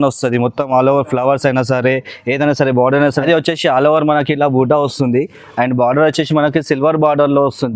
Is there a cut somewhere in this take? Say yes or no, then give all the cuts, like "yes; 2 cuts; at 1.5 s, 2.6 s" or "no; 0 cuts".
yes; 1 cut; at 3.2 s